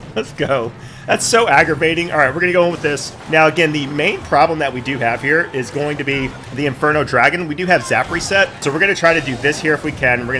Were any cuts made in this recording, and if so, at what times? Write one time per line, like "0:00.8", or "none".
none